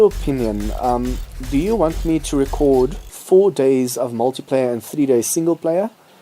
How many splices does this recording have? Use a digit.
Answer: 1